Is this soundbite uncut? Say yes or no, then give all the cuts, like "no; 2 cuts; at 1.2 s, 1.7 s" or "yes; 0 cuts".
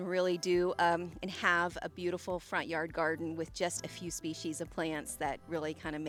yes; 0 cuts